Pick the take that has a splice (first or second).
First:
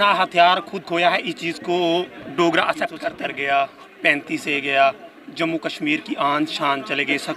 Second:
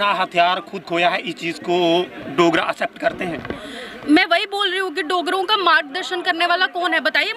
first